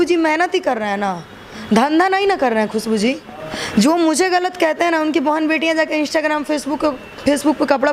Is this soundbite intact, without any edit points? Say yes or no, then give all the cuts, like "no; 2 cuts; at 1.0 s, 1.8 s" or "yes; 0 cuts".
no; 1 cut; at 3.3 s